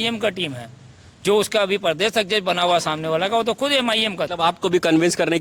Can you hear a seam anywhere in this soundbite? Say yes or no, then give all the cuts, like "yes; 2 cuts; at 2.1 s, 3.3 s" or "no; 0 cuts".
yes; 1 cut; at 4.3 s